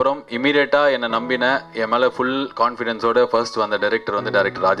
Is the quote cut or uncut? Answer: uncut